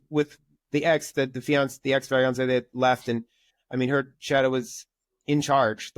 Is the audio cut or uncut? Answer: uncut